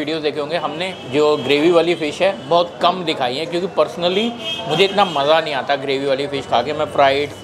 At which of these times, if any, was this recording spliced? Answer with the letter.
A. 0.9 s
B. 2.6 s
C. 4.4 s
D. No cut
A